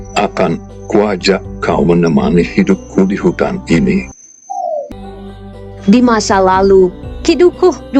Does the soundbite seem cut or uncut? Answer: cut